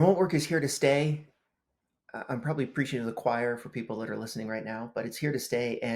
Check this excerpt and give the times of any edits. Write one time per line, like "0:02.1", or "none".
none